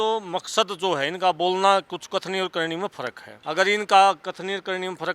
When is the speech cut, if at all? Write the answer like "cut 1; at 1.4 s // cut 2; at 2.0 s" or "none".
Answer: cut 1; at 3.3 s